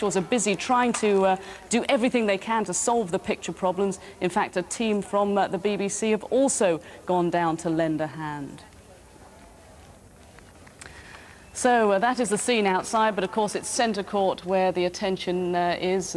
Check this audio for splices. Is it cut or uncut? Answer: uncut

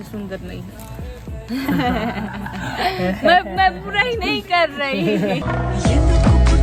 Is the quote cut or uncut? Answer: uncut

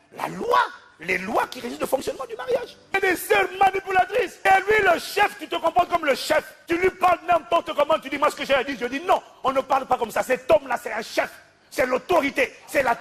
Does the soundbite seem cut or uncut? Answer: cut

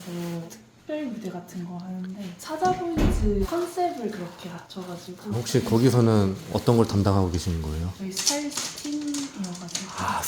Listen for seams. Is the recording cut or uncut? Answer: uncut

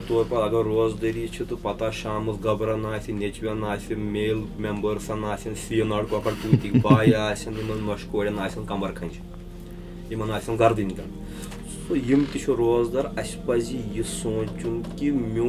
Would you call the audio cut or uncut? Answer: uncut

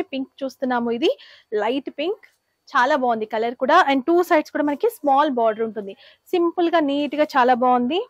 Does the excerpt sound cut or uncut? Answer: uncut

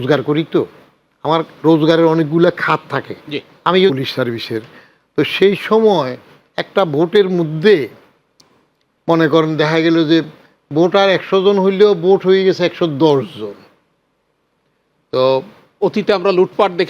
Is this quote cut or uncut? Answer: cut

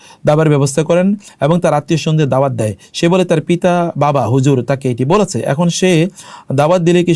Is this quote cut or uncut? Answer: uncut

